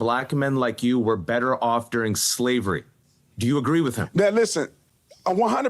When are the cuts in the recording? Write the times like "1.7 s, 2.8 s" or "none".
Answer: 4.8 s